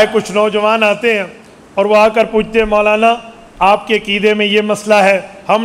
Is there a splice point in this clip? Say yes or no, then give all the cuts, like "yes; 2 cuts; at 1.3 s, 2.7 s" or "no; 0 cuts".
no; 0 cuts